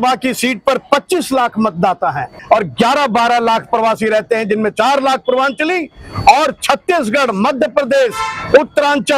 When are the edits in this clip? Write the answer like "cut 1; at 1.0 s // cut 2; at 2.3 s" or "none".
cut 1; at 2.4 s